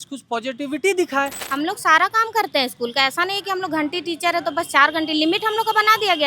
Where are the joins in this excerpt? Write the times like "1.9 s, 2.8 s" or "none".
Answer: 1.4 s